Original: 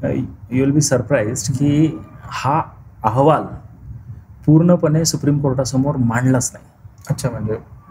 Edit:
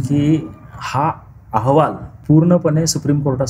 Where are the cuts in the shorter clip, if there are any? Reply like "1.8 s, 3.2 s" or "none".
2.1 s